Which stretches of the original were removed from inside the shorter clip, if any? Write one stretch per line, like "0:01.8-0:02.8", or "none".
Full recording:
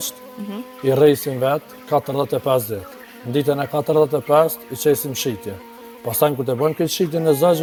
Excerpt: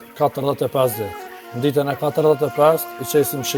none